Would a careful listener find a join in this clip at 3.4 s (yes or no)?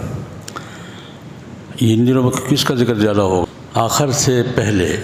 yes